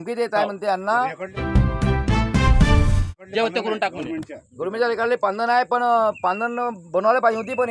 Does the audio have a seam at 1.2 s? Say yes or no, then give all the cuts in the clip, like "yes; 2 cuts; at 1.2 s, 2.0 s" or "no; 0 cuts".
yes; 2 cuts; at 1.2 s, 3.2 s